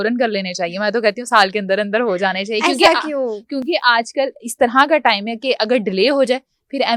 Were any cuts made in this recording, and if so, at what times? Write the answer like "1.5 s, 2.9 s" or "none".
none